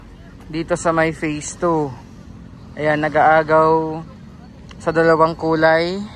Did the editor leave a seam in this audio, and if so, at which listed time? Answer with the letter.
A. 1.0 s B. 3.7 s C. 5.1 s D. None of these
D